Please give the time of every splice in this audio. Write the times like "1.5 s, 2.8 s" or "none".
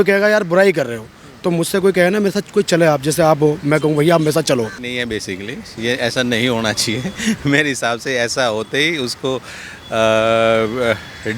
4.8 s